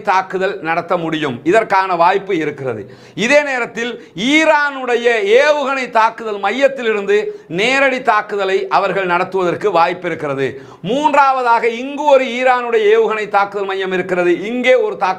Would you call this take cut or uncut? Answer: uncut